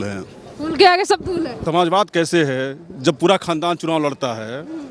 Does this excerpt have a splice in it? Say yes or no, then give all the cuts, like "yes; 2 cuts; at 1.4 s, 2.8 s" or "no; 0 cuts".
yes; 1 cut; at 1.6 s